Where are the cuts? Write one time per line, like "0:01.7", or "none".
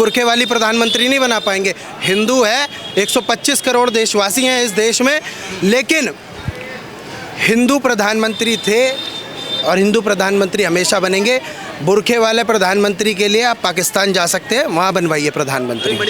none